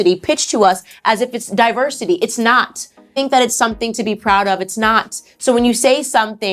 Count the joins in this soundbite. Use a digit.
1